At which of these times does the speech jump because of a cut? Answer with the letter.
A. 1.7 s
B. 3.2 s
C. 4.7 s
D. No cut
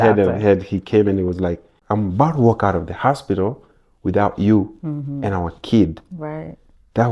A